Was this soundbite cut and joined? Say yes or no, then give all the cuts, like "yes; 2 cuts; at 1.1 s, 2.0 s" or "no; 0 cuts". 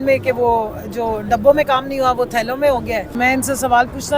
yes; 1 cut; at 3.2 s